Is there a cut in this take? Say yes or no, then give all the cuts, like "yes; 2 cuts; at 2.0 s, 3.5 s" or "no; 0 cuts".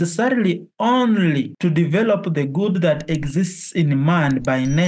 yes; 1 cut; at 1.5 s